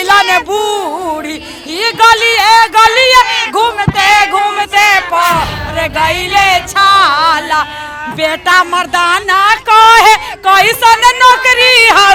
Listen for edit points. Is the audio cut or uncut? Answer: uncut